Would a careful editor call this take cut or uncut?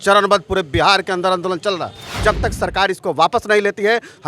cut